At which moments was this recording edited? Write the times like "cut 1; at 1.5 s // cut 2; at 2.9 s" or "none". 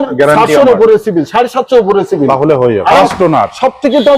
cut 1; at 3.0 s